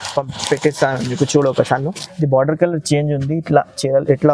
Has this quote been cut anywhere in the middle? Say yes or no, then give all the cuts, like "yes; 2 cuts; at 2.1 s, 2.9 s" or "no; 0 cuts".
no; 0 cuts